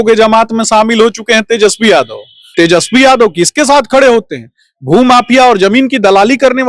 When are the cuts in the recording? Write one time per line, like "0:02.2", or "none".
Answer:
0:02.4